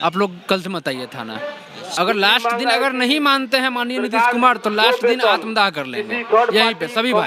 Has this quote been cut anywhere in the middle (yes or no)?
yes